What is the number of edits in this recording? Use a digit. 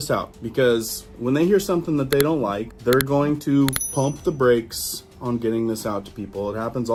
0